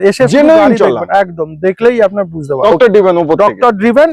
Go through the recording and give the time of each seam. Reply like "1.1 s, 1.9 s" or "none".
2.7 s